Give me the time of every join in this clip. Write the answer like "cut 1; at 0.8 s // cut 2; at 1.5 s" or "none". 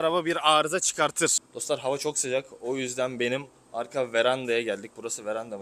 none

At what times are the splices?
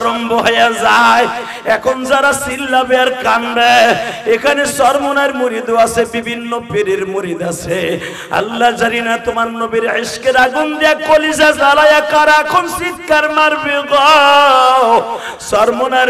none

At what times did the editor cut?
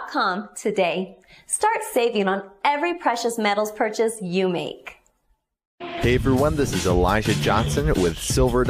cut 1; at 1.9 s

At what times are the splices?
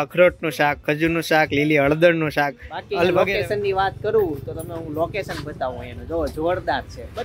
cut 1; at 3.1 s

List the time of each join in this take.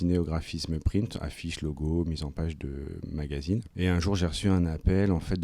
cut 1; at 3.7 s

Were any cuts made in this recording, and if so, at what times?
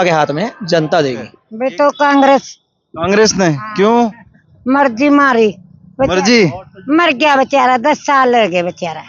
cut 1; at 1.4 s

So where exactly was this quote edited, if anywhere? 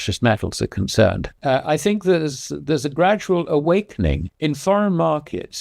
cut 1; at 1.3 s // cut 2; at 4.3 s

